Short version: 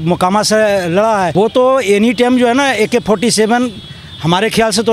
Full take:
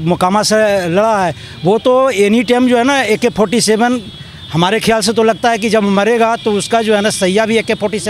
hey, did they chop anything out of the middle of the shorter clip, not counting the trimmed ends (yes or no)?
yes